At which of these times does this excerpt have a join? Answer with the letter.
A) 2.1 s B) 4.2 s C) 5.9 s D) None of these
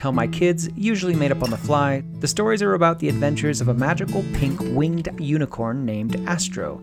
A